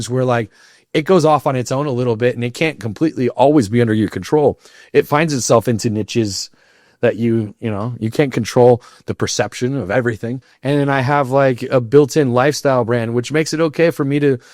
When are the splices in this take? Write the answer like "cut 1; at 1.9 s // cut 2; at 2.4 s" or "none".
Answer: cut 1; at 10.5 s